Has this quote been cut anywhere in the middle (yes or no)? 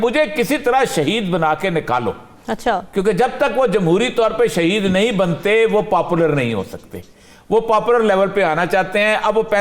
no